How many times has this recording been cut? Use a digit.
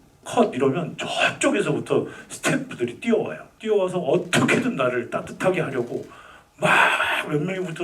1